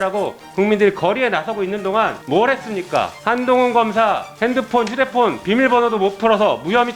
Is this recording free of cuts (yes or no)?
no